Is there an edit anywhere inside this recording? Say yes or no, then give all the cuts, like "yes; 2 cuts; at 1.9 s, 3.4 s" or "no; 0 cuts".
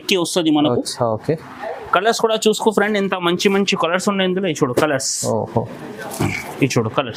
no; 0 cuts